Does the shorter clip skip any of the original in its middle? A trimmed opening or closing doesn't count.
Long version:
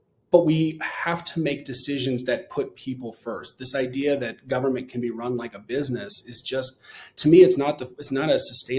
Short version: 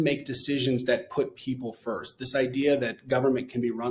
no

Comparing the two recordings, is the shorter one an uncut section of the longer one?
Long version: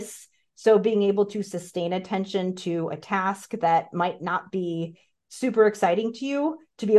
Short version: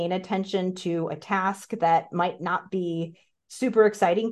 yes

